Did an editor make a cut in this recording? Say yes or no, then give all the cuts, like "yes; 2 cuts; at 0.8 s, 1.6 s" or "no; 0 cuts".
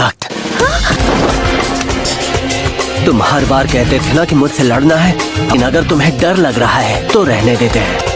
yes; 1 cut; at 1.0 s